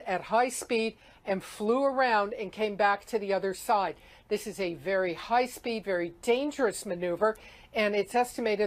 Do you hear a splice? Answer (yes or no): no